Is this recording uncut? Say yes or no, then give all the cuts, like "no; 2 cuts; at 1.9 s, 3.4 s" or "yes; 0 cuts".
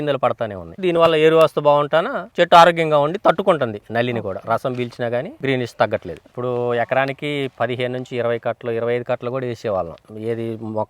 no; 1 cut; at 6.2 s